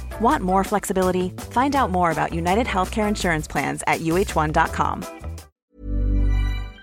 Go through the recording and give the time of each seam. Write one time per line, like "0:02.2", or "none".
0:05.5